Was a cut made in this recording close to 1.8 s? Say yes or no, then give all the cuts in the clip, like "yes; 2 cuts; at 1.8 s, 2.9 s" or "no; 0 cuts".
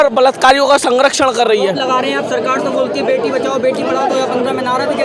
no; 0 cuts